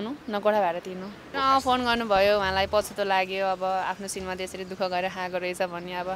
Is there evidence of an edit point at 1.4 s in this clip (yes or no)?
yes